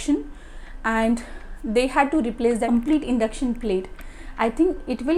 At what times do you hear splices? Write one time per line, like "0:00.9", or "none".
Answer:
none